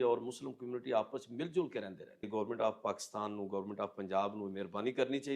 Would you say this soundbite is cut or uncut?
cut